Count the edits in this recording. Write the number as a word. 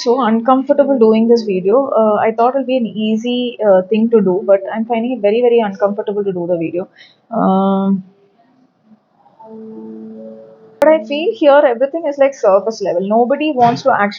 one